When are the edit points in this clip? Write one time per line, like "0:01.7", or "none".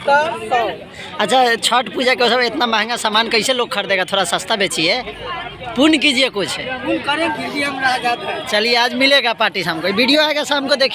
0:07.3